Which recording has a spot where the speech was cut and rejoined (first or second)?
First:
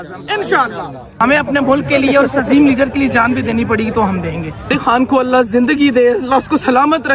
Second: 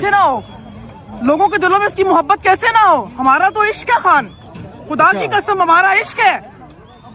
first